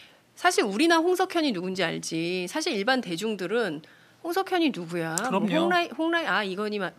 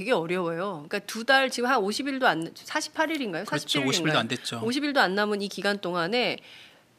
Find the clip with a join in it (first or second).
second